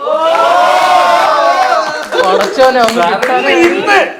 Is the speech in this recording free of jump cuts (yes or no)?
yes